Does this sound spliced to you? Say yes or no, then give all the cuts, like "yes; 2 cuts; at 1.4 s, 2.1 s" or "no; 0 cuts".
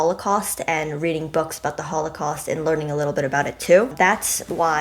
yes; 1 cut; at 3.9 s